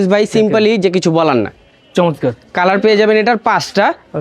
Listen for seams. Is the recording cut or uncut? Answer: uncut